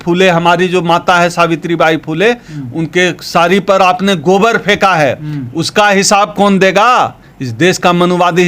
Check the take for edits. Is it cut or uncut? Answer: uncut